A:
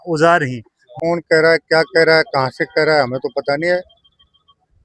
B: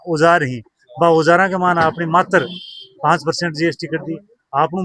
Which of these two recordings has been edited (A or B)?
A